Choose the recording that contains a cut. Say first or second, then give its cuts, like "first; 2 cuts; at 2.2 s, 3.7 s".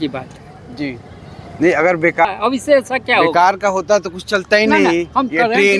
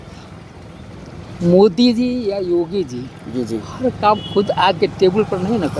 first; 1 cut; at 2.2 s